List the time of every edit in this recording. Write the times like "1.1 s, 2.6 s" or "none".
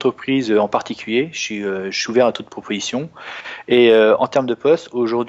none